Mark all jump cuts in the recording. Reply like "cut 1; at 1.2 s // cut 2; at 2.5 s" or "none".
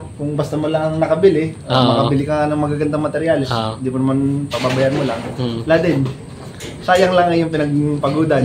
none